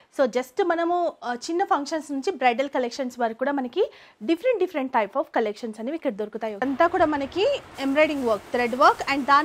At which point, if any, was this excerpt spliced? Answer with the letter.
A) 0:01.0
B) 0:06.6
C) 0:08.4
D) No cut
B